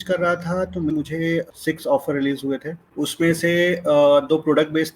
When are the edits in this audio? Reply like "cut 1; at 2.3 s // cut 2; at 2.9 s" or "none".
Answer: cut 1; at 1.2 s // cut 2; at 2.8 s